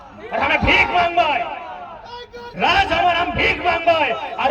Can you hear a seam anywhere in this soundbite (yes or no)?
no